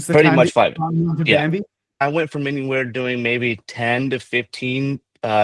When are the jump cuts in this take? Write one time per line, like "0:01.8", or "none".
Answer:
0:02.0